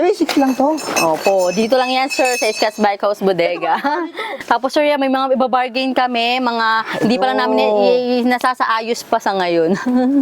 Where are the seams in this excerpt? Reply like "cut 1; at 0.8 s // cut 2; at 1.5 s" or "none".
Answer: cut 1; at 4.2 s